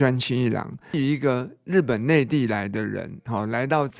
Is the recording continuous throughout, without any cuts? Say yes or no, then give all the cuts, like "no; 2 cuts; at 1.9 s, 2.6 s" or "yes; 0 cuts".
no; 1 cut; at 0.9 s